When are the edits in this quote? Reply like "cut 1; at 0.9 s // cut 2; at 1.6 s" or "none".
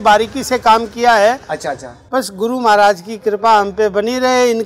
cut 1; at 2.1 s